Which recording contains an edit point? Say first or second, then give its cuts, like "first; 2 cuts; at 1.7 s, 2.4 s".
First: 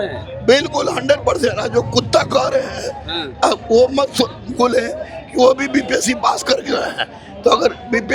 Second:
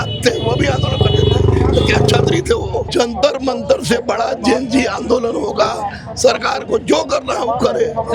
second; 1 cut; at 2.8 s